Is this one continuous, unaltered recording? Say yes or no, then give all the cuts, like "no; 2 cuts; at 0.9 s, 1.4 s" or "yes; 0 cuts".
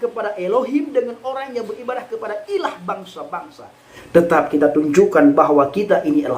no; 1 cut; at 4.0 s